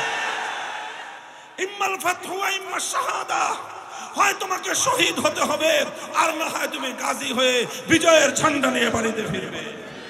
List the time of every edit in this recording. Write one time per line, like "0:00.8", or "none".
0:01.2